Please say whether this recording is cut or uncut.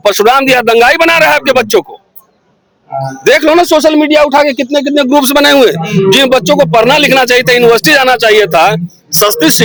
uncut